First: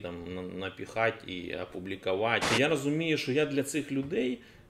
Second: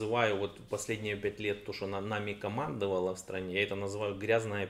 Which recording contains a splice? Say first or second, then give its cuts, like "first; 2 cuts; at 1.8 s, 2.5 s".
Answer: first; 1 cut; at 2.4 s